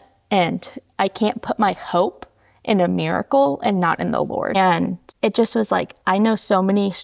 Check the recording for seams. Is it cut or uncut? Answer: cut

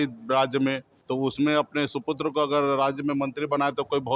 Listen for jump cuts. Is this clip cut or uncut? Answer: cut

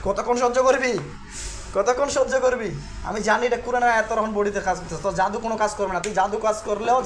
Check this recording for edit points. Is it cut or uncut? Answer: uncut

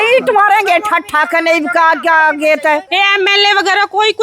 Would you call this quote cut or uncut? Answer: cut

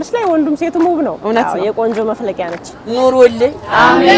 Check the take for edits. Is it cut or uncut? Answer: cut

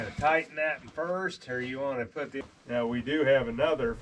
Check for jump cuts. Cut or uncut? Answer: cut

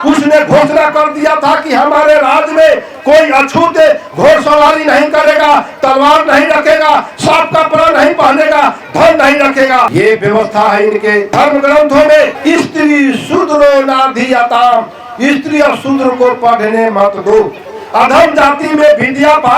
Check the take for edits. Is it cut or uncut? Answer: cut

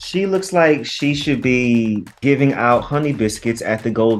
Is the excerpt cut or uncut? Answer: cut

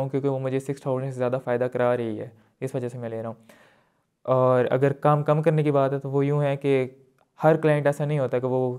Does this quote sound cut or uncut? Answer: uncut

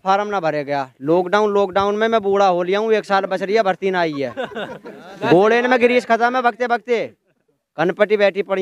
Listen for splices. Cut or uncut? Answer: uncut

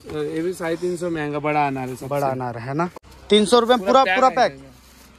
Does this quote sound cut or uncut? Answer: cut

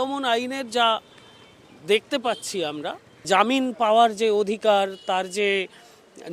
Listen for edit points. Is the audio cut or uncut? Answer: uncut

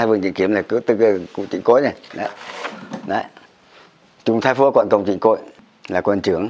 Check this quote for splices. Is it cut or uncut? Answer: cut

